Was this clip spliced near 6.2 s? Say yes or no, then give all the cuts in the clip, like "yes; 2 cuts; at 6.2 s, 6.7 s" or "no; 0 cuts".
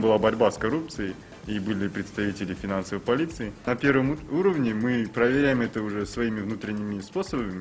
no; 1 cut; at 3.7 s